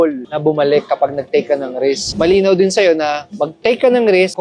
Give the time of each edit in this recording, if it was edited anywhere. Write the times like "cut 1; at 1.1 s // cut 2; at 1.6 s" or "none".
cut 1; at 2.1 s